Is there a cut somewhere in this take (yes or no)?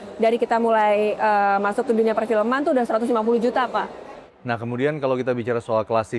yes